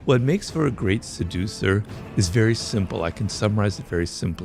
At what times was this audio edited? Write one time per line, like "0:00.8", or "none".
none